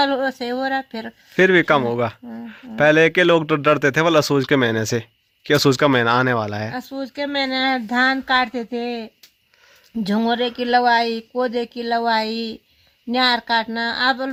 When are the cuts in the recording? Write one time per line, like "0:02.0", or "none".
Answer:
none